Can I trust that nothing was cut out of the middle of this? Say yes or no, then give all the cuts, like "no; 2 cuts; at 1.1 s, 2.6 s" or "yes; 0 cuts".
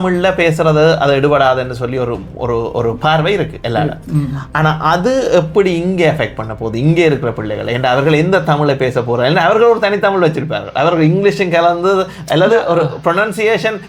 yes; 0 cuts